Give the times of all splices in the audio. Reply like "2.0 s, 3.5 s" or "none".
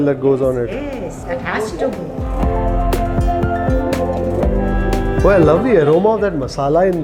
2.2 s